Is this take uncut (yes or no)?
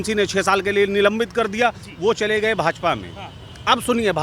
yes